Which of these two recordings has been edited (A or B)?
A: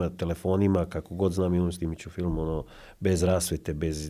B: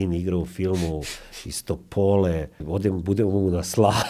B